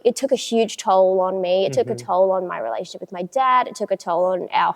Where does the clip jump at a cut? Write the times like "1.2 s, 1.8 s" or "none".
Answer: none